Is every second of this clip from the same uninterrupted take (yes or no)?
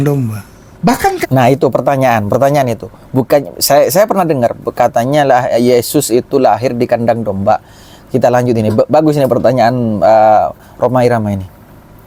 yes